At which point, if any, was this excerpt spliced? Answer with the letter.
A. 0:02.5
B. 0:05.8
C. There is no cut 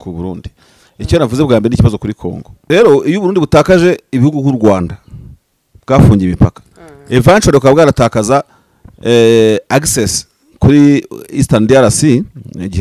A